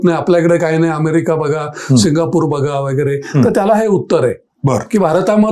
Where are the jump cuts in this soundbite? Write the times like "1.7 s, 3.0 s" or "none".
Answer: none

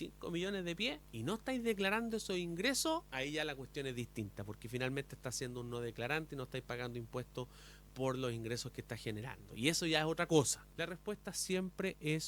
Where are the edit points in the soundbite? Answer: 1.1 s, 3.1 s, 10.6 s

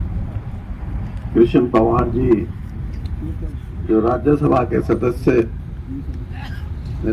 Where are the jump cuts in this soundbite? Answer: none

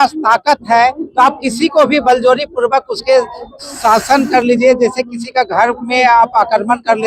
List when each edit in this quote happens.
none

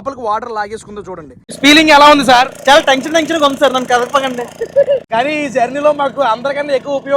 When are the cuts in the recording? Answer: 1.5 s, 5.1 s

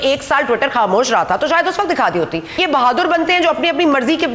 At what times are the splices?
2.5 s

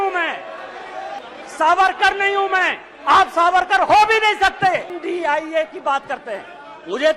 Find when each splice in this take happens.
1.2 s, 4.9 s

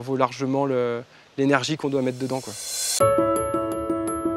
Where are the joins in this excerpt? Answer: 2.8 s

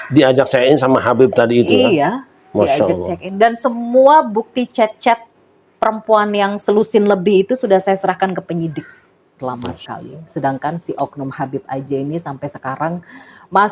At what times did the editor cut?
9.4 s

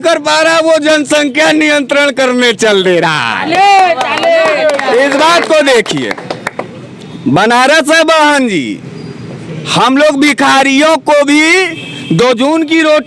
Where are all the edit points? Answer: none

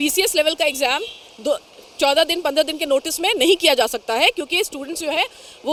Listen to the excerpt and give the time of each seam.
none

